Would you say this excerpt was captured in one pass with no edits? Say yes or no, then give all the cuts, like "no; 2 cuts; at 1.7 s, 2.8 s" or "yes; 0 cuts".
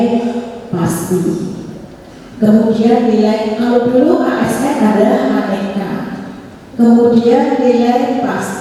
yes; 0 cuts